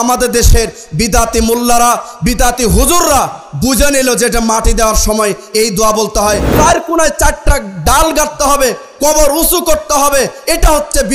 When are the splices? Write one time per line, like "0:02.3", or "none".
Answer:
0:06.5